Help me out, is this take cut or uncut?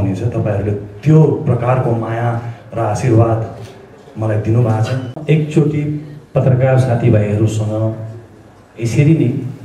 cut